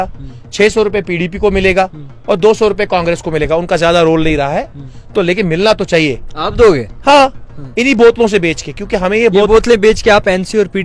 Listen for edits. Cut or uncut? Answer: uncut